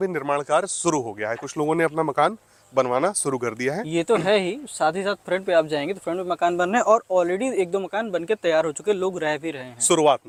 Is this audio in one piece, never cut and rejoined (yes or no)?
yes